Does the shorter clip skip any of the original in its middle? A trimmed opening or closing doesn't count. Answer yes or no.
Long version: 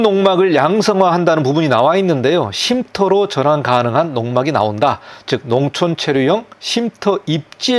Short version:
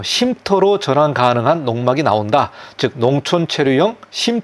no